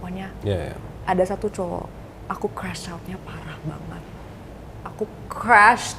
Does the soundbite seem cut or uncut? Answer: uncut